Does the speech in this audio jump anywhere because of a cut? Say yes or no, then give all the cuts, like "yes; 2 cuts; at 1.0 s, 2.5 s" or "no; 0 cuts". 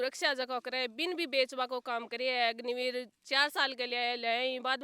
no; 0 cuts